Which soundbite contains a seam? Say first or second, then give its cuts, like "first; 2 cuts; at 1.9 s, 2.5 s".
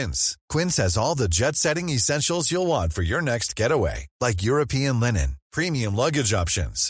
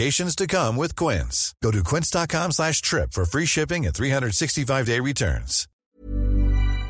second; 1 cut; at 5.8 s